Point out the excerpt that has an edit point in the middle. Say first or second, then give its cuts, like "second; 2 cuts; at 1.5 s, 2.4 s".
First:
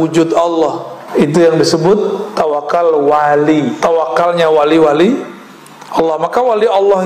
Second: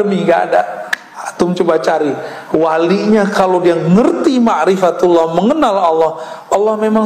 first; 2 cuts; at 1.0 s, 3.7 s